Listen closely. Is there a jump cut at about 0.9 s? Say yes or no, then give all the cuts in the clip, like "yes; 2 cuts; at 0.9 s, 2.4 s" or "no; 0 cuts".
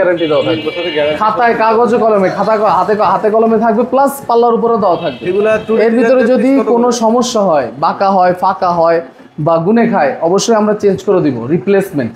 no; 0 cuts